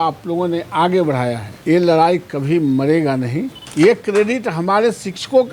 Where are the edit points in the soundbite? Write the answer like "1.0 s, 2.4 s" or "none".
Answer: 1.5 s, 3.6 s